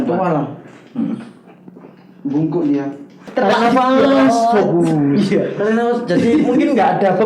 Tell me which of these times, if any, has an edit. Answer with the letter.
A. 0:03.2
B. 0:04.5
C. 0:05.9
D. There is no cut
A